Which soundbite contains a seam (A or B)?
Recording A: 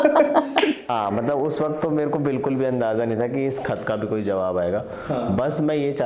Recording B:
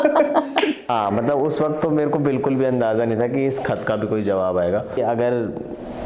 B